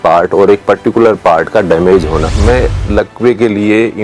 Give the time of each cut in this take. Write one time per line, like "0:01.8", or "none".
0:02.3